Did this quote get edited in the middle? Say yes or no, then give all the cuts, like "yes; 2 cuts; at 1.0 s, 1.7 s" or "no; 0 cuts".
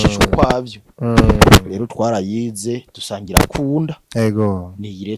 no; 0 cuts